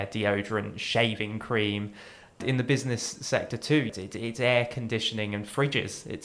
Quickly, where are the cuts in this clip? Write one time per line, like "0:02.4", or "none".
0:02.4
0:03.9